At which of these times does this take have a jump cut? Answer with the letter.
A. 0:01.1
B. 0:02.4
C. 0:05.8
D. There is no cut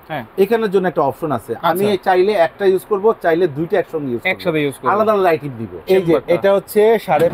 C